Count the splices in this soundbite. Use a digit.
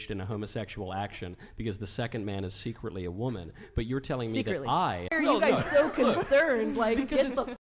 1